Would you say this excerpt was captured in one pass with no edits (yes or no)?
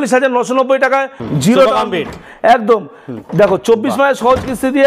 no